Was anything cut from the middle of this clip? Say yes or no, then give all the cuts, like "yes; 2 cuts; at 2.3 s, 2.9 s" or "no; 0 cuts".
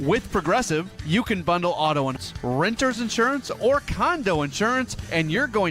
yes; 1 cut; at 2.2 s